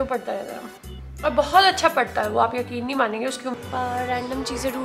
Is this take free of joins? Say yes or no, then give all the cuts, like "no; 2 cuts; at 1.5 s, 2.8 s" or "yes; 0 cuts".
no; 1 cut; at 3.5 s